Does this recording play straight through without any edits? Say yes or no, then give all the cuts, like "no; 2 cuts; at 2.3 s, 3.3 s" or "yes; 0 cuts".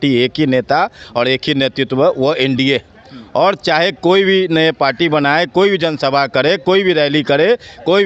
yes; 0 cuts